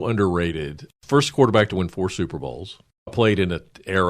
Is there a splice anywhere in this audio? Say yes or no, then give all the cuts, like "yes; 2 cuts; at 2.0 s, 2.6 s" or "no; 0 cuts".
yes; 2 cuts; at 0.9 s, 3.1 s